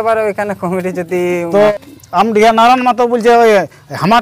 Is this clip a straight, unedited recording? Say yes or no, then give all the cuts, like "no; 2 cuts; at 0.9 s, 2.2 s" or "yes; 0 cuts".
no; 1 cut; at 2.0 s